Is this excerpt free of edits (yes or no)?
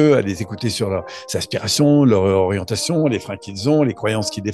yes